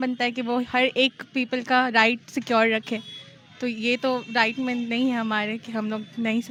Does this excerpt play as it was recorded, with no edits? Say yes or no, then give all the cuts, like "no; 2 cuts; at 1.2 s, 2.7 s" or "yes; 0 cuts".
yes; 0 cuts